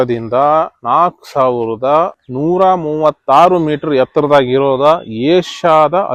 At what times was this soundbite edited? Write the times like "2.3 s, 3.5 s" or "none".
none